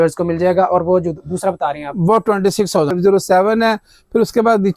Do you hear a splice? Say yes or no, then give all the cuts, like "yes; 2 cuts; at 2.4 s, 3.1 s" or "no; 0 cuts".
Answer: yes; 1 cut; at 2.9 s